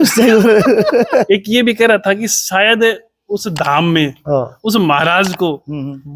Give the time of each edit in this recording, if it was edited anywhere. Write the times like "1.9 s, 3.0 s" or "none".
1.3 s